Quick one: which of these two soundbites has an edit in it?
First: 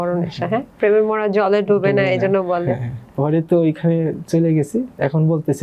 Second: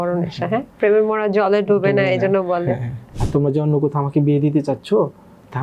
second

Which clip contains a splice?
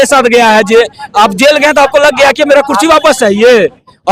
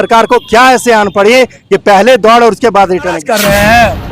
second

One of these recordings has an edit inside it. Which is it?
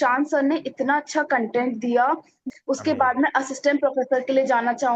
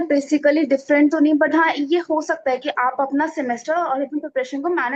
first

